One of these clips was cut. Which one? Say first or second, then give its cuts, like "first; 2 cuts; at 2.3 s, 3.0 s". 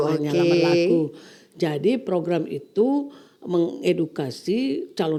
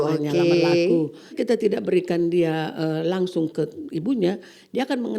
second; 1 cut; at 1.3 s